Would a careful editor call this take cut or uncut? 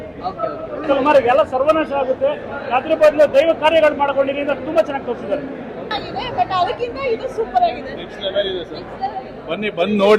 cut